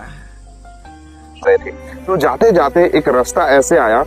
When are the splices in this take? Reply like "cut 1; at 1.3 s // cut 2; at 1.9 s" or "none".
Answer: cut 1; at 1.5 s

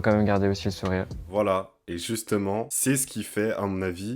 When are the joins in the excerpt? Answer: cut 1; at 1.2 s

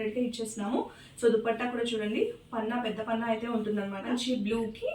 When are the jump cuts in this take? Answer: cut 1; at 4.0 s

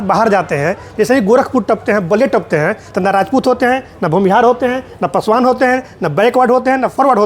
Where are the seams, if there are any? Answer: none

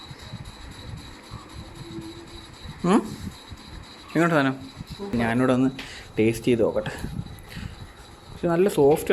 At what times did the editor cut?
cut 1; at 5.1 s

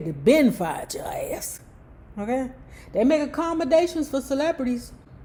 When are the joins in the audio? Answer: none

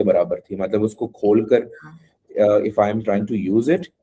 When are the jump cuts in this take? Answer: none

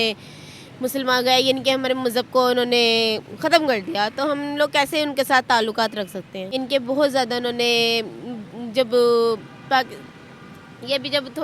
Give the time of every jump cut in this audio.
cut 1; at 6.4 s

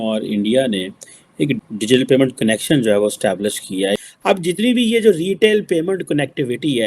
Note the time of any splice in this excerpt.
cut 1; at 4.0 s

